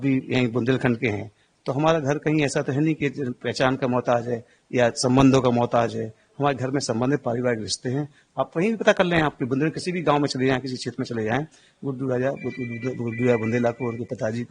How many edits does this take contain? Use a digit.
0